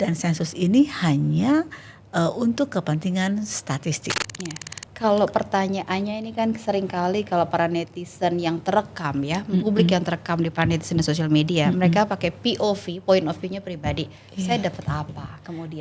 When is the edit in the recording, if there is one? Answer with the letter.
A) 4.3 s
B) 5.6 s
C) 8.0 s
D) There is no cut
A